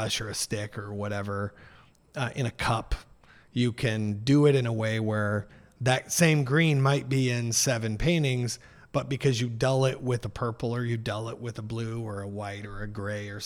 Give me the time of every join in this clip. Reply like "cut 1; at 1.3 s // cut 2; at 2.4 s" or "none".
none